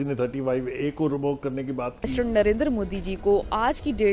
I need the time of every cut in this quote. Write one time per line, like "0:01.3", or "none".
0:02.1